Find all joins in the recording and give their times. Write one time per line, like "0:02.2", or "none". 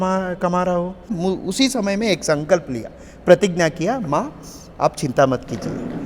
0:01.1